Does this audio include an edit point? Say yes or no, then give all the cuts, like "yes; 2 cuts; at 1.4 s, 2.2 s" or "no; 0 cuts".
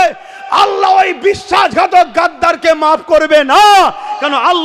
no; 0 cuts